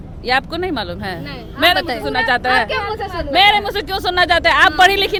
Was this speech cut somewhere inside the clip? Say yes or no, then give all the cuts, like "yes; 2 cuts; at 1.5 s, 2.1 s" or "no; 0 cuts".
no; 0 cuts